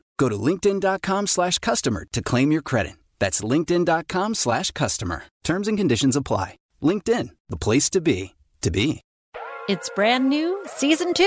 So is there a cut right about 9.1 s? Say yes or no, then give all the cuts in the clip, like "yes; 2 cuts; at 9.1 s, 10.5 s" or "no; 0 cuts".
yes; 1 cut; at 9.1 s